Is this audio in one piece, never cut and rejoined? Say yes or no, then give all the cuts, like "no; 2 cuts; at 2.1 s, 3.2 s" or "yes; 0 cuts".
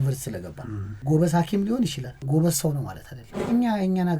no; 3 cuts; at 0.9 s, 2.1 s, 3.4 s